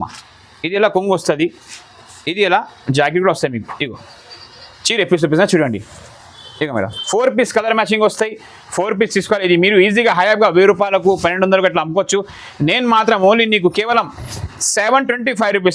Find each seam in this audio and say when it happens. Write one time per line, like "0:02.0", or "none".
none